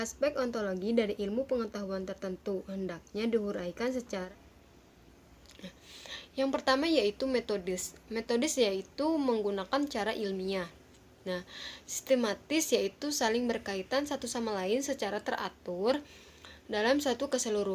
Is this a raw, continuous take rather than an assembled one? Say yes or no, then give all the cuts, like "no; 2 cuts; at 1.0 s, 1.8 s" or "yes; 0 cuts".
no; 1 cut; at 4.3 s